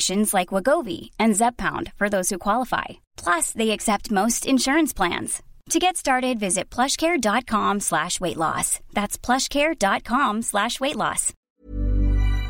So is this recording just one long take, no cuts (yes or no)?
no